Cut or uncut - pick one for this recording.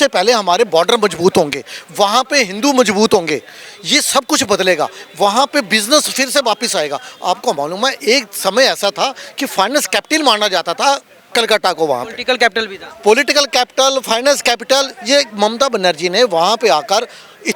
uncut